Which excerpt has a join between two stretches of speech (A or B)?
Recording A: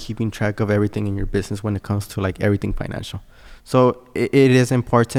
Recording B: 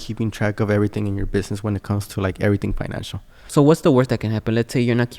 B